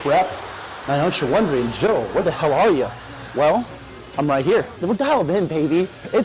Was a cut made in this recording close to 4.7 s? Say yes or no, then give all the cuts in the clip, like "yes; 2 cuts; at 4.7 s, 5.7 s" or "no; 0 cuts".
yes; 1 cut; at 4.7 s